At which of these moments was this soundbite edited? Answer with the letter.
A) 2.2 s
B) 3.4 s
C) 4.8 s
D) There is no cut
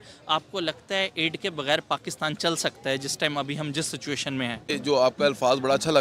C